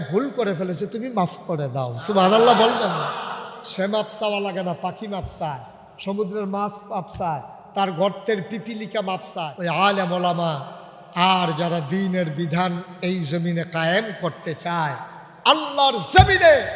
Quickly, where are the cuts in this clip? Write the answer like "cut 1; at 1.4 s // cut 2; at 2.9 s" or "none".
cut 1; at 9.5 s

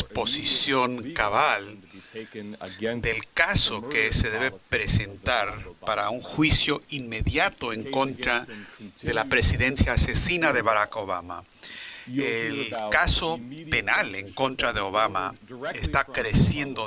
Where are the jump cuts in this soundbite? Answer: none

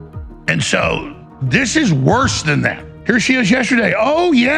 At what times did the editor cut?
cut 1; at 2.9 s

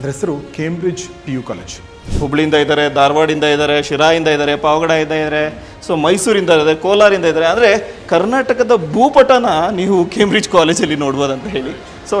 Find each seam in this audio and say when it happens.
cut 1; at 2.0 s

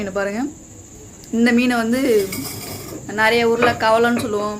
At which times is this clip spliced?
none

